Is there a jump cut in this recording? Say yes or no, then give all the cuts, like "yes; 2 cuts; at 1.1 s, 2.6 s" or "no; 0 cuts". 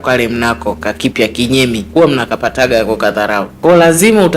yes; 2 cuts; at 1.8 s, 3.5 s